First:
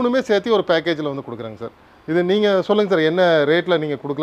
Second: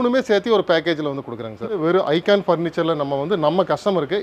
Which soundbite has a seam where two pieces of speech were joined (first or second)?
second